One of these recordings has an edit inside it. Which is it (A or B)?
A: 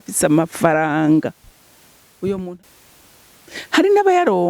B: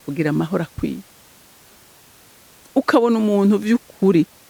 A